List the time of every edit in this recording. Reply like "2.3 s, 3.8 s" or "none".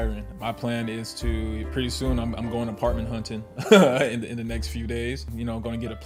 none